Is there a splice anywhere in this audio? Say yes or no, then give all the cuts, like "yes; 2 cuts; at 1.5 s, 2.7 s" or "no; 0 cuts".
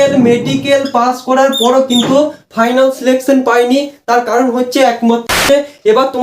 yes; 1 cut; at 5.3 s